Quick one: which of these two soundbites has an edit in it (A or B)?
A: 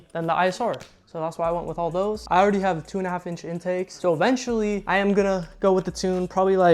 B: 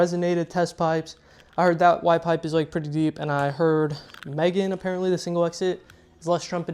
A